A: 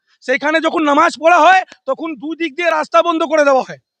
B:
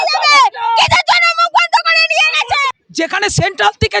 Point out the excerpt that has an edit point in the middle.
B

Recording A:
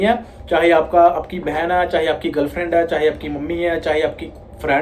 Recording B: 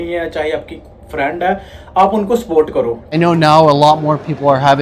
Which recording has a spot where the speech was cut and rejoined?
B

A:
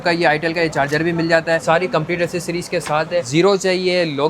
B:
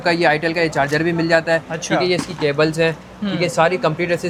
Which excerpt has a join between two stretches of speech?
A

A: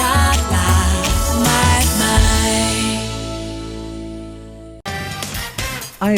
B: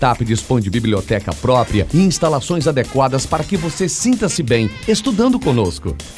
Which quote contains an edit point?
A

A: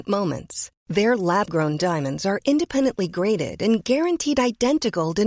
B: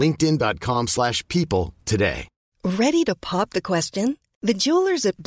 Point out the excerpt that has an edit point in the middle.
B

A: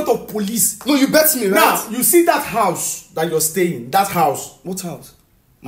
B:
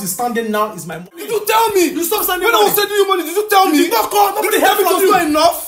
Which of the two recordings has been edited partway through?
B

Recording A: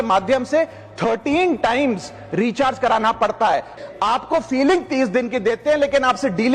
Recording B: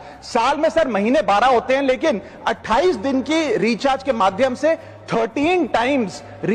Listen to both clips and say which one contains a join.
A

